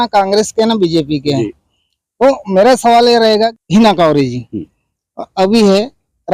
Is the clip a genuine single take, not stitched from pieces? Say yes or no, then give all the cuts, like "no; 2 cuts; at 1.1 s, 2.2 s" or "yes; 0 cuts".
no; 1 cut; at 3.6 s